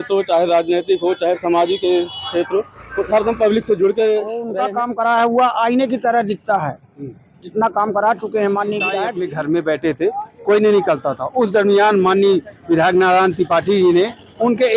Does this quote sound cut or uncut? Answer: cut